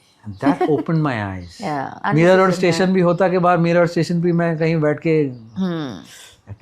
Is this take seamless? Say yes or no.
no